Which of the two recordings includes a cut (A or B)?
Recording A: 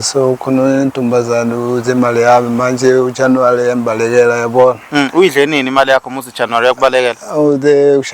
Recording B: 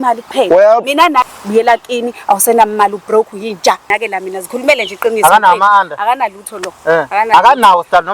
B